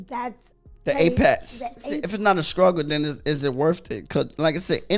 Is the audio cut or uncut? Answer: cut